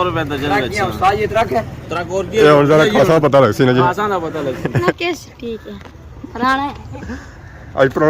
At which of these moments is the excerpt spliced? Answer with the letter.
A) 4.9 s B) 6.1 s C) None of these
A